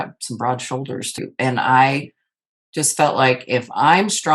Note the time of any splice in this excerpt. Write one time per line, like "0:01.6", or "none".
0:01.2